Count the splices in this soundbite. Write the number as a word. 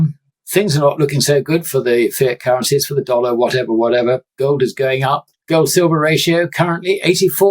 one